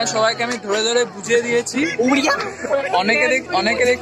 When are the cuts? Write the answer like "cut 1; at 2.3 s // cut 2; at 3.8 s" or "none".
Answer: cut 1; at 2.9 s